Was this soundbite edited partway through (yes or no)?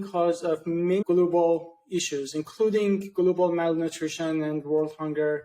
no